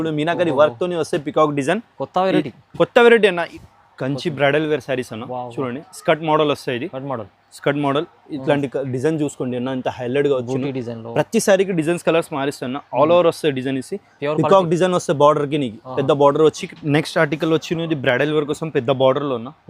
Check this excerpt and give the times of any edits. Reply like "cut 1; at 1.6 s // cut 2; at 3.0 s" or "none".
cut 1; at 3.5 s // cut 2; at 16.7 s